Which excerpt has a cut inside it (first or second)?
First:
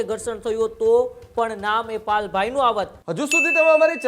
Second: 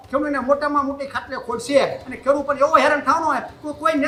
first